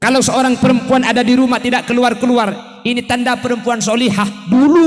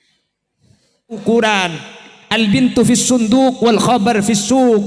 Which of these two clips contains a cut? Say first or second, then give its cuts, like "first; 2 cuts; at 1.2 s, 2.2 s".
second; 1 cut; at 1.2 s